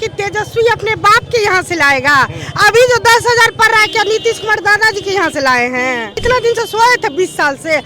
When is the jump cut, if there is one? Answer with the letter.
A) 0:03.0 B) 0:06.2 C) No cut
B